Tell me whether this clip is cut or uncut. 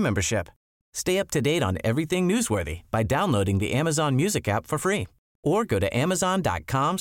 uncut